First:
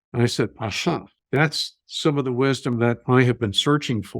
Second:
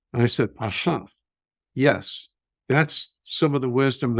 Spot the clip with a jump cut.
first; 1 cut; at 1.1 s

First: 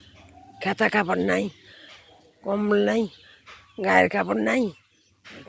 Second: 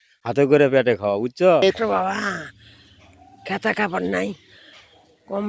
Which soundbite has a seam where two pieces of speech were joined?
second; 1 cut; at 1.7 s

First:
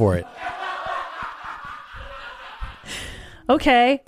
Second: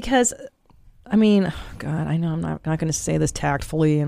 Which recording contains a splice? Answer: first; 1 cut; at 2.8 s

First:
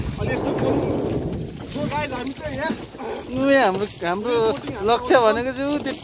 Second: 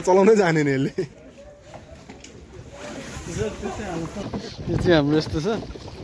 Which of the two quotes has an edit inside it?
second; 1 cut; at 4.1 s

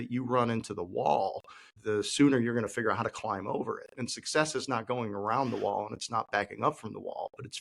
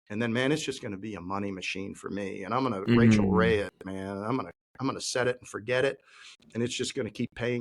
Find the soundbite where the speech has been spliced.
first; 1 cut; at 1.7 s

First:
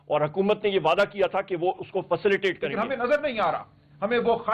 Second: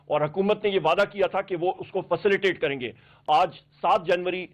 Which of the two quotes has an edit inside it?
first; 1 cut; at 2.7 s

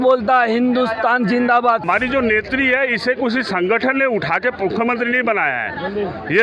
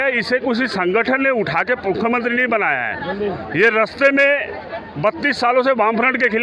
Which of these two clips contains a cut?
first; 1 cut; at 1.8 s

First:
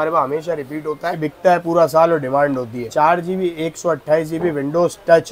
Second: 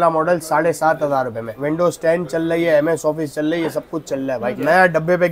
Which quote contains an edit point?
second; 2 cuts; at 1.5 s, 4.5 s

